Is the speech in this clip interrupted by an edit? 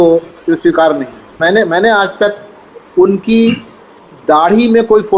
yes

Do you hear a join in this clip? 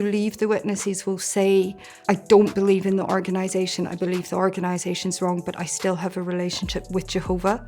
yes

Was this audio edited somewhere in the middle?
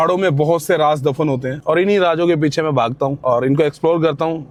no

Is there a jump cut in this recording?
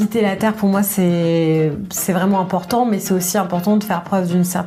no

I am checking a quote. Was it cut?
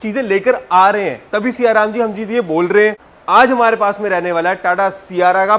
no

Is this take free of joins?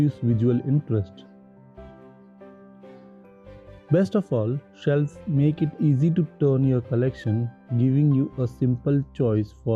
yes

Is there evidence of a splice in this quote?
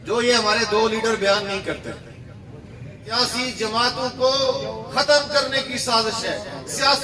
yes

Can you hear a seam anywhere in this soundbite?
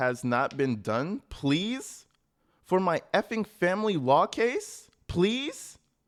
no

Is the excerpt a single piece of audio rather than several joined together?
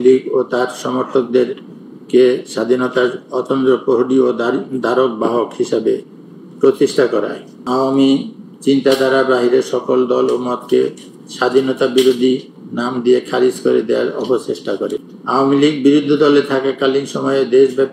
no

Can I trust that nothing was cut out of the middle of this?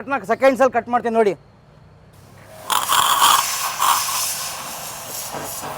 yes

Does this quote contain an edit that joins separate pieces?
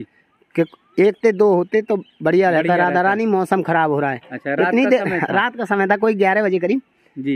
no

